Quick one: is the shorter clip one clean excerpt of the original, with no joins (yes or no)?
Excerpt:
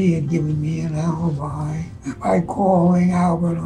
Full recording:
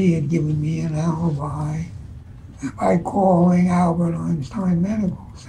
no